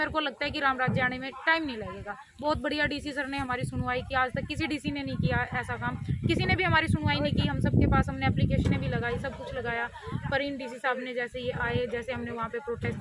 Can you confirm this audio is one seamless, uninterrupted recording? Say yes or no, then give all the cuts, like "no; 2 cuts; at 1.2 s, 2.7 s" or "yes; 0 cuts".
yes; 0 cuts